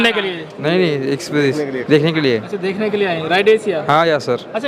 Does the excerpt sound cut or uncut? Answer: uncut